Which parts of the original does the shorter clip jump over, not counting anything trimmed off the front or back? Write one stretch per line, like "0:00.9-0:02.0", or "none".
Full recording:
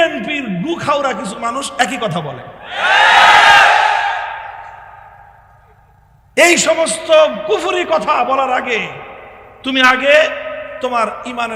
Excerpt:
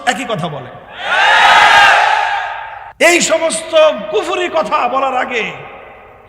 0:05.0-0:06.6